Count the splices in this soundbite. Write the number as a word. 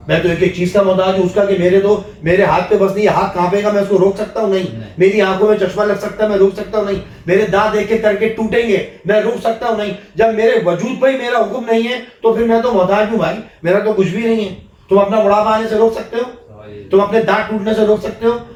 zero